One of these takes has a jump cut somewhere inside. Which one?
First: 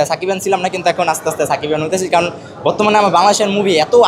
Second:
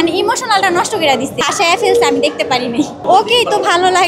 second; 2 cuts; at 1.4 s, 3.0 s

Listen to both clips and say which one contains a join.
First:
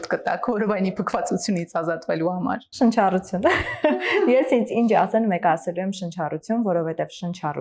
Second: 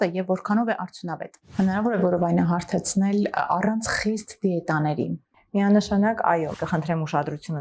second; 2 cuts; at 1.4 s, 6.5 s

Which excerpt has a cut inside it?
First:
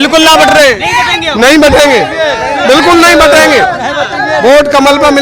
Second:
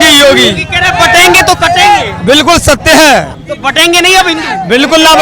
second; 1 cut; at 3.4 s

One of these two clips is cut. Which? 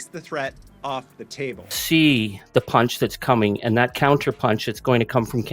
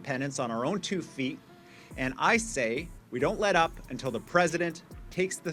first; 1 cut; at 1.6 s

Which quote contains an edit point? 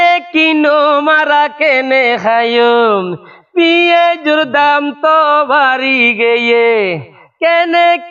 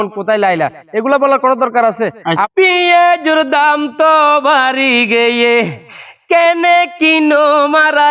second; 1 cut; at 2.4 s

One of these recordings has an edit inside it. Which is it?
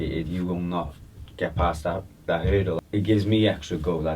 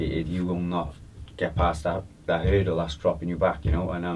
first; 1 cut; at 2.8 s

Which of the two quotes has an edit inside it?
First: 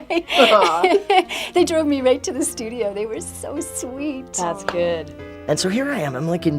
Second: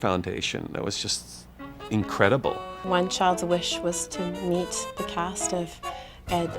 first; 1 cut; at 4.5 s

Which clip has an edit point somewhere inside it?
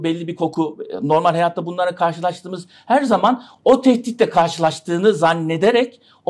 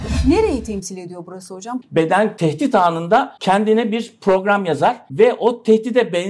second; 4 cuts; at 1.7 s, 2.3 s, 3.3 s, 5.0 s

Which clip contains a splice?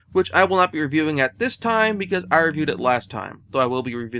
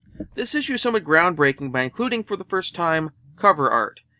second; 1 cut; at 1.3 s

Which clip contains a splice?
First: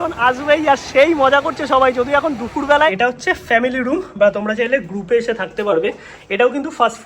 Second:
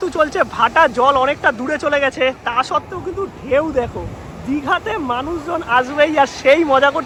first; 1 cut; at 2.9 s

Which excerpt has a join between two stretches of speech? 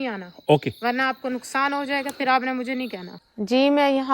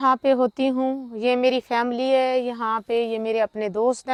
first; 1 cut; at 3.1 s

